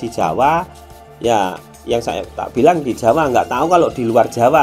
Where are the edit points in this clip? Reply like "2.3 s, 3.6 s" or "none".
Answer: none

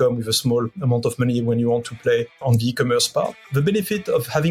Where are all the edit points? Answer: 2.4 s, 3.4 s

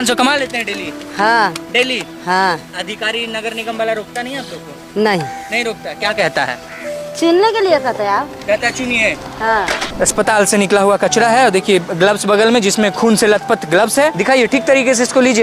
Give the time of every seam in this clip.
9.9 s, 12.9 s, 14.2 s

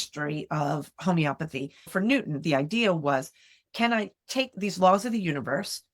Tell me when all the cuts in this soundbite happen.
1.9 s, 4.5 s

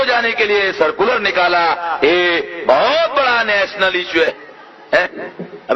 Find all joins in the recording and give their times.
4.3 s

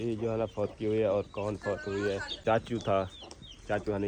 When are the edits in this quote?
2.4 s

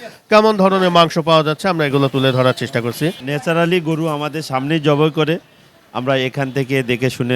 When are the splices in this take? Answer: 3.2 s

